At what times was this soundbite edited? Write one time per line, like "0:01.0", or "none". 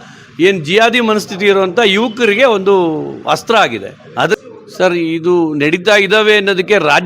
0:04.4